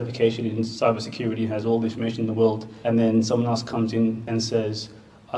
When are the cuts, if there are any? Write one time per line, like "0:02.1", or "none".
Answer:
0:02.7
0:04.2